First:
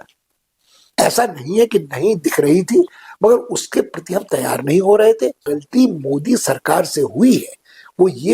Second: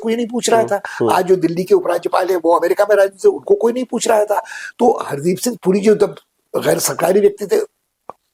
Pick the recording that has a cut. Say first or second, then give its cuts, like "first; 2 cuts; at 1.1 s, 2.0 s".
first; 1 cut; at 5.5 s